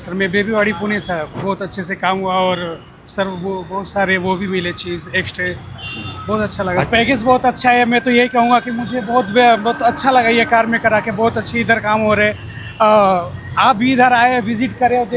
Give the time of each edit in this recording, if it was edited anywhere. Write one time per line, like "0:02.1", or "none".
0:01.3
0:06.9